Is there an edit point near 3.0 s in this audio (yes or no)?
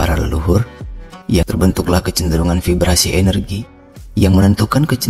no